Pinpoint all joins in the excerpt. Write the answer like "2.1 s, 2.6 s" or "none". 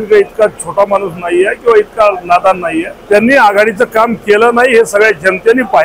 2.9 s